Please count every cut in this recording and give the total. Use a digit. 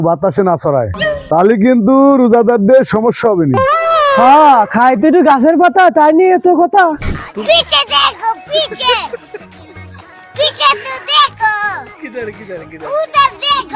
1